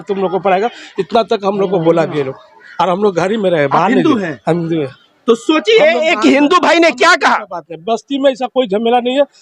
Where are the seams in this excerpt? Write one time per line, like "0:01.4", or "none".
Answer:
none